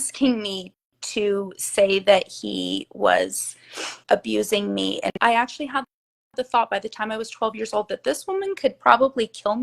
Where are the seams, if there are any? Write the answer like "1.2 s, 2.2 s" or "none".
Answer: 5.1 s